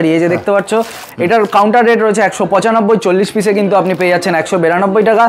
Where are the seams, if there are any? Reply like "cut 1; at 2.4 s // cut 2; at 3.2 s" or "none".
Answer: cut 1; at 1.0 s